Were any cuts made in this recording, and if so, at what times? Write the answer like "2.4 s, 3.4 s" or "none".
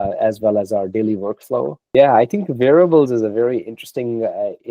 1.8 s